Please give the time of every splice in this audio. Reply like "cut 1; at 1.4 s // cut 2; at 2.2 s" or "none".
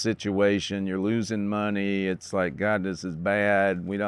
none